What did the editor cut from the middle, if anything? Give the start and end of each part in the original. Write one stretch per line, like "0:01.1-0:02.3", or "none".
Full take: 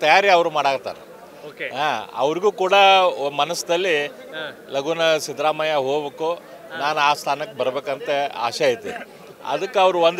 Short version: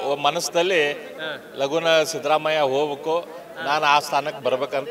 none